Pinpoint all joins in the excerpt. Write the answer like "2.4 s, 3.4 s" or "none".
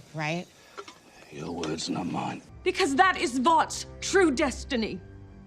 2.4 s

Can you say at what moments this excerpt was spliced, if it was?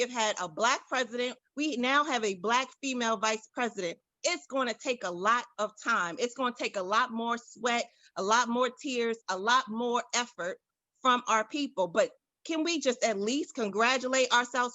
1.4 s

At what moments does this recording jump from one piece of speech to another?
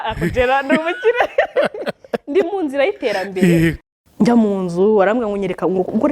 3.9 s

